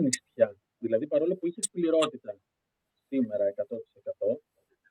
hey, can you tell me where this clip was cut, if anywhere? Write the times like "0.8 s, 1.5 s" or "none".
none